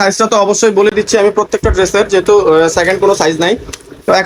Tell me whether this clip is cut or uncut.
uncut